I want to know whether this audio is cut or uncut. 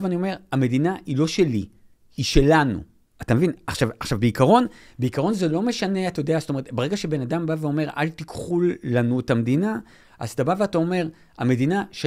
uncut